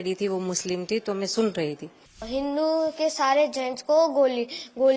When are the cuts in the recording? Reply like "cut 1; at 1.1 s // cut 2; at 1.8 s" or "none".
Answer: cut 1; at 2.2 s